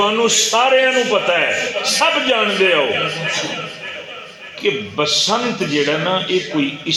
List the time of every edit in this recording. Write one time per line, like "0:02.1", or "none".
none